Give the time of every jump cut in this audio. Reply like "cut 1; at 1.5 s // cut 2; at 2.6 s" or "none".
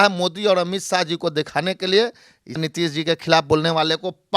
cut 1; at 2.6 s